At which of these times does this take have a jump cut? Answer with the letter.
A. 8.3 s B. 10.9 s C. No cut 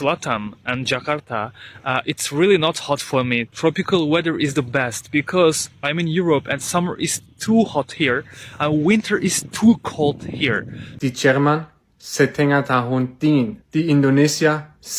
B